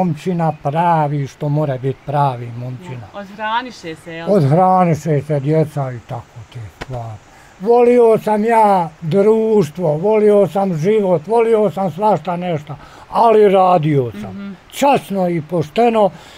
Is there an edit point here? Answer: yes; 1 cut; at 7.5 s

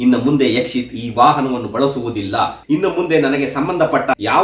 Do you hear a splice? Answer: yes; 1 cut; at 2.6 s

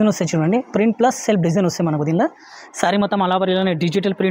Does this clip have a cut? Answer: no; 0 cuts

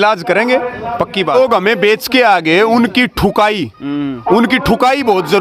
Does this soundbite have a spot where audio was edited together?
yes; 1 cut; at 1.3 s

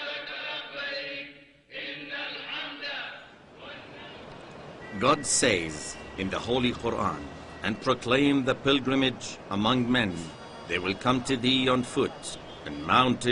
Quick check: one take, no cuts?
no; 1 cut; at 8.4 s

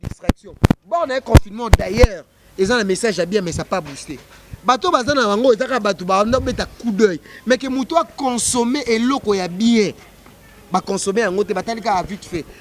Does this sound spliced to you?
no; 0 cuts

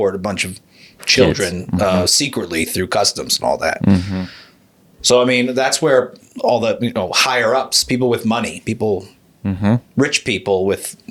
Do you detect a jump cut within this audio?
no; 0 cuts

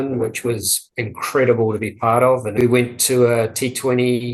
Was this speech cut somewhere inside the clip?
yes; 1 cut; at 2.6 s

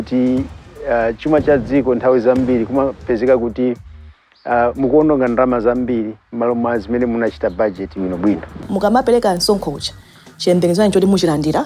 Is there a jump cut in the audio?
yes; 1 cut; at 8.6 s

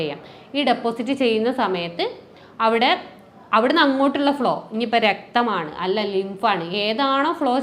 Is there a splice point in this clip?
no; 0 cuts

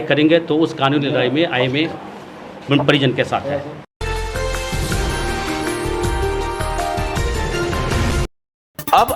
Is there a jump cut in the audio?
no; 0 cuts

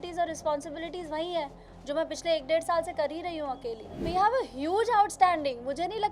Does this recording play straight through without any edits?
no; 1 cut; at 4.1 s

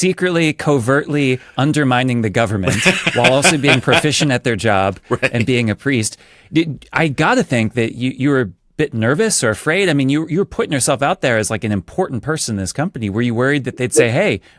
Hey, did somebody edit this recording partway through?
no; 0 cuts

